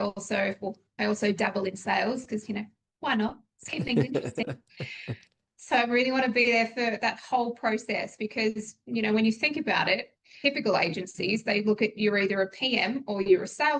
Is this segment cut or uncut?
cut